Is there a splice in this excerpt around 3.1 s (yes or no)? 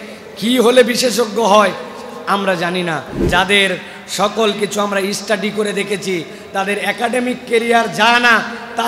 yes